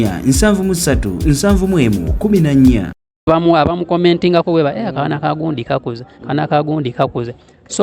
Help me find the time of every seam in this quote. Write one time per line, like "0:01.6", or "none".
0:03.3